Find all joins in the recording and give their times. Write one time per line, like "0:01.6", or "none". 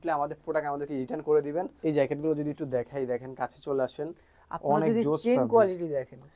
0:01.8